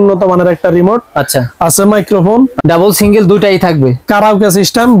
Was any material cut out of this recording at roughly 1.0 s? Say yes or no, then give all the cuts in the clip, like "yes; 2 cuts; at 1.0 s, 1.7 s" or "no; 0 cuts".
no; 1 cut; at 2.6 s